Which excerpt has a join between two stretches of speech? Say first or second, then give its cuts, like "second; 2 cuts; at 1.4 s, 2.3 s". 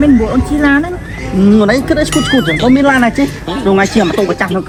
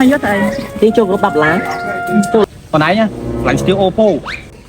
second; 1 cut; at 2.4 s